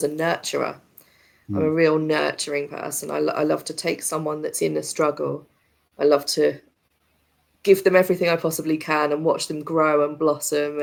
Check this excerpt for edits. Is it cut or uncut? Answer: uncut